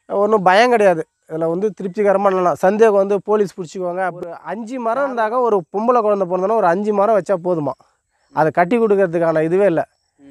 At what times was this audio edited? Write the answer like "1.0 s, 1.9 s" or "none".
4.5 s